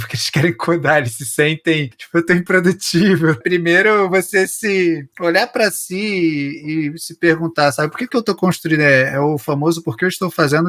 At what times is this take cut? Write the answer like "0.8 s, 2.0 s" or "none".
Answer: 3.4 s, 8.1 s